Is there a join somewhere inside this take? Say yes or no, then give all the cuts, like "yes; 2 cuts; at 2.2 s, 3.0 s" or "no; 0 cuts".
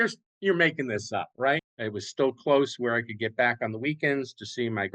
yes; 1 cut; at 1.6 s